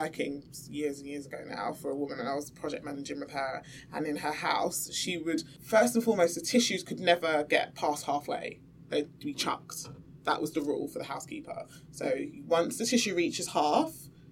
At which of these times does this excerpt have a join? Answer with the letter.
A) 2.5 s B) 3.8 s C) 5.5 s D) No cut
C